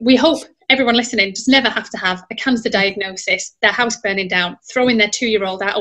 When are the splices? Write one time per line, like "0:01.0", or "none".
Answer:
none